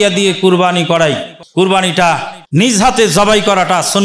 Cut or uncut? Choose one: cut